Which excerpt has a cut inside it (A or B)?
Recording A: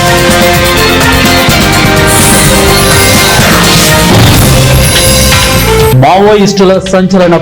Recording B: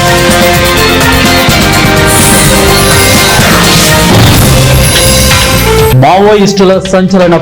A